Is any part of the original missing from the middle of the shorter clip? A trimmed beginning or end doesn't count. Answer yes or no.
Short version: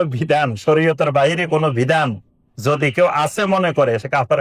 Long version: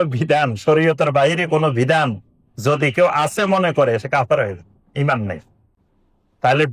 no